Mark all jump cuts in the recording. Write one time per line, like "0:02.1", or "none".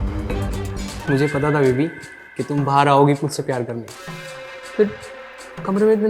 0:00.9